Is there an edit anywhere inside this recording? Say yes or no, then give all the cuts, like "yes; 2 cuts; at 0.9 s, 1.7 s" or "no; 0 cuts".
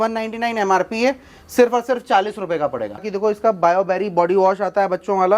yes; 1 cut; at 3.1 s